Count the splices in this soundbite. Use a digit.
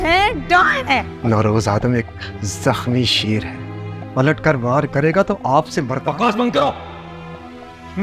1